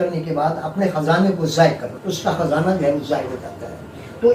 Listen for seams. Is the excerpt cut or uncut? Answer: cut